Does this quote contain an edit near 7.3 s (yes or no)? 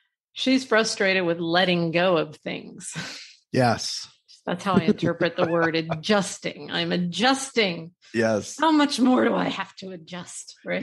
no